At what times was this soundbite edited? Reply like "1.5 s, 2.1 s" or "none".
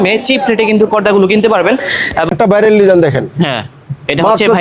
2.2 s